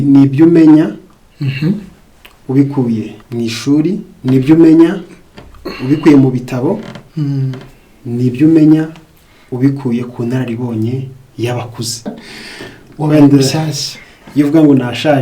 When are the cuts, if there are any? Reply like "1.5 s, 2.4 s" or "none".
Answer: 3.2 s, 4.1 s, 12.1 s